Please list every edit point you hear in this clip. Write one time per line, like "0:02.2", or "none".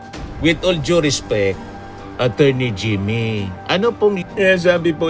0:04.2

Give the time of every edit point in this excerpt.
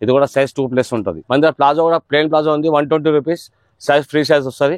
0:01.2

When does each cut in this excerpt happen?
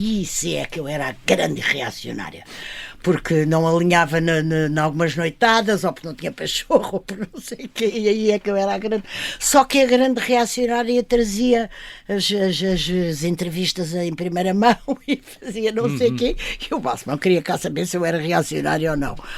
none

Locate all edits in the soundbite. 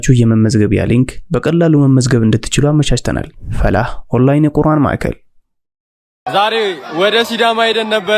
0:05.6

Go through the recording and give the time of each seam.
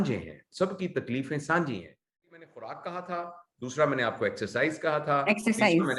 0:02.4

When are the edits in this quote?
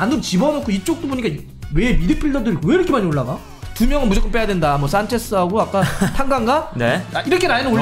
0:03.6
0:07.0

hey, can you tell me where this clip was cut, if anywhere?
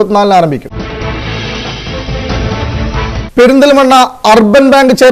none

